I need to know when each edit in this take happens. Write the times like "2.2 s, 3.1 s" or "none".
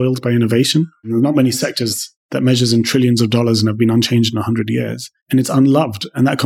1.0 s